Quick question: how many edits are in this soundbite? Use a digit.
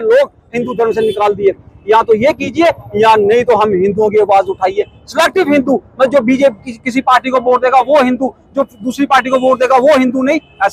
0